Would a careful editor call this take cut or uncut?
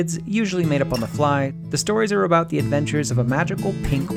cut